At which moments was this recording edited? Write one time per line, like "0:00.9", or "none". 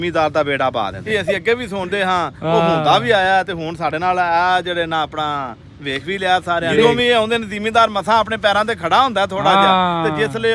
0:01.0
0:06.8